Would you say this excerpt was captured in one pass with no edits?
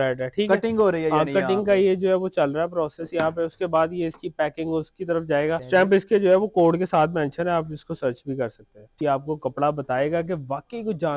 no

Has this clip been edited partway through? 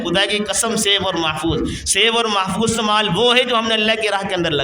no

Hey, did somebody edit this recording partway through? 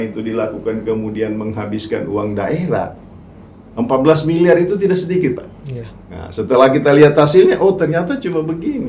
no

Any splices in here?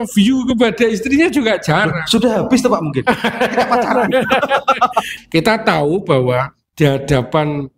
yes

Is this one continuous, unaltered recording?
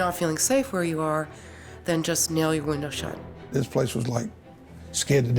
no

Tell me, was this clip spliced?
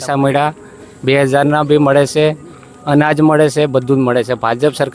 no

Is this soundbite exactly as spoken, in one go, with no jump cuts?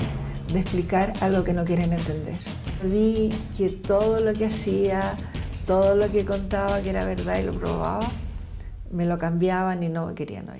no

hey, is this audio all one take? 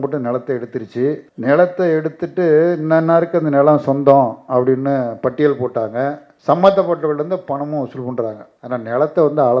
no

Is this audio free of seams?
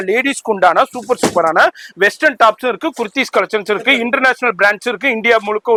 yes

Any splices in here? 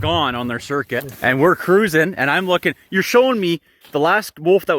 yes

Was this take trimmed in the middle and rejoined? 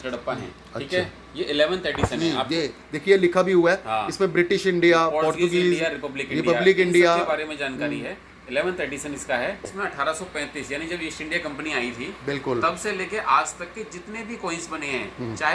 yes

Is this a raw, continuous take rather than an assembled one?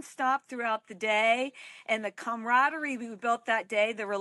yes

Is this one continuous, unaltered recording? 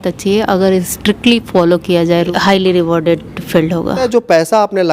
no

